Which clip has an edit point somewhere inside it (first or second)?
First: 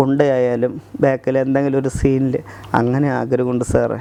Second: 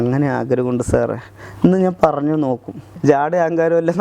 second